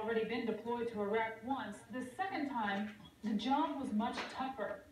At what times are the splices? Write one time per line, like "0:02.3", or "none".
0:03.1